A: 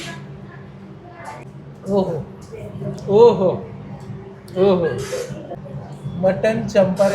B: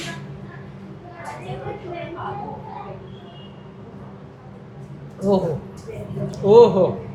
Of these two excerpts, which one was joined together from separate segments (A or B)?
A